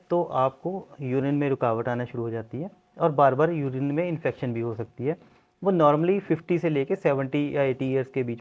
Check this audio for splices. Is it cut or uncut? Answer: uncut